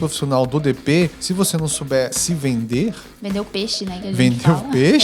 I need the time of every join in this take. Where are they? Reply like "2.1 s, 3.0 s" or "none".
1.2 s, 2.2 s